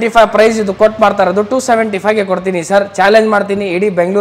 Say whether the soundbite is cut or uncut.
uncut